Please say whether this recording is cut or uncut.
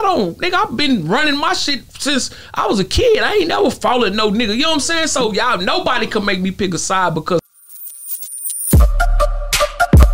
cut